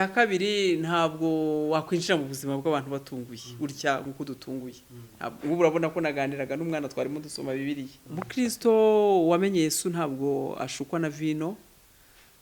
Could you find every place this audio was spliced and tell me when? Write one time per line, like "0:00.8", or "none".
0:08.0